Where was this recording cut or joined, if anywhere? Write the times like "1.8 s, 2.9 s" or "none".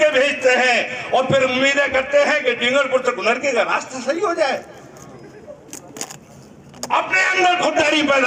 none